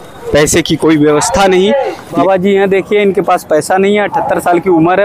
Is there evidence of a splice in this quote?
yes; 1 cut; at 2.2 s

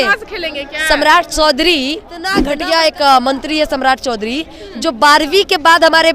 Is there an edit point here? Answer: yes; 1 cut; at 2.4 s

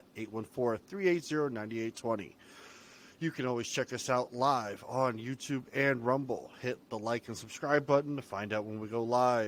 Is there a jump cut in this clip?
no; 0 cuts

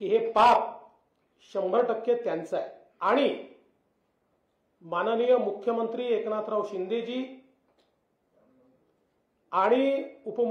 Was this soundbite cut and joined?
yes; 1 cut; at 2.8 s

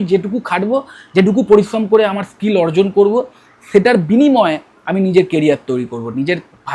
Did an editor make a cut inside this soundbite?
no; 0 cuts

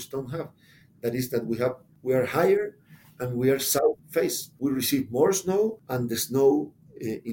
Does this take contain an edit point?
no; 0 cuts

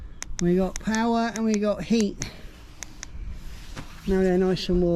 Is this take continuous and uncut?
yes; 0 cuts

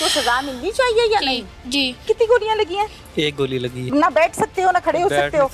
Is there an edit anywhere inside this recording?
yes; 2 cuts; at 2.0 s, 3.9 s

